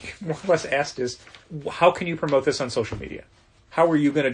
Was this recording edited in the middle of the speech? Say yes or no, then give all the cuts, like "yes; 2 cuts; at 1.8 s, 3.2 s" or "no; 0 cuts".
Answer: yes; 1 cut; at 1.5 s